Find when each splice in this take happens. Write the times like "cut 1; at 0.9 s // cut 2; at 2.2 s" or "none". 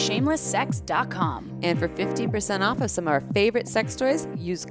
none